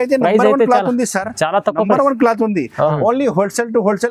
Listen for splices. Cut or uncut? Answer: cut